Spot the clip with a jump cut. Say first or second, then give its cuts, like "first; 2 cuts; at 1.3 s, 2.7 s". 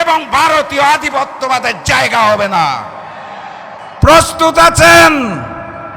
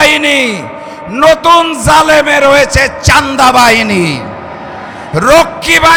first; 1 cut; at 3.8 s